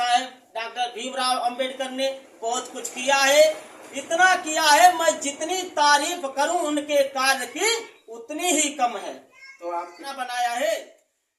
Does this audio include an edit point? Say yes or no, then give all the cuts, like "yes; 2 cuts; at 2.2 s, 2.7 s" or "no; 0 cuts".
yes; 1 cut; at 10.1 s